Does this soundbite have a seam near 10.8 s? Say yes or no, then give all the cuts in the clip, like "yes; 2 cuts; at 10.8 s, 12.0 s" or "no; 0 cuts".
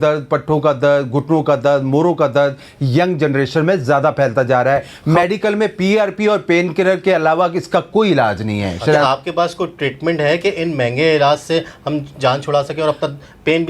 no; 2 cuts; at 4.9 s, 9.0 s